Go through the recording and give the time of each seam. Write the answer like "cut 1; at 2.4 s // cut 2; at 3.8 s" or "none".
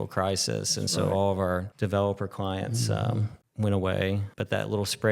cut 1; at 1.7 s // cut 2; at 3.4 s // cut 3; at 4.3 s